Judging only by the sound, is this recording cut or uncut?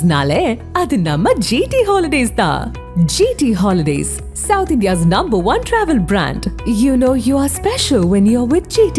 uncut